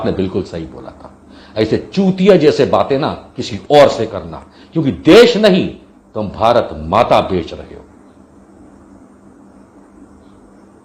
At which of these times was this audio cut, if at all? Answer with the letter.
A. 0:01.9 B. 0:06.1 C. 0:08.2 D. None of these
D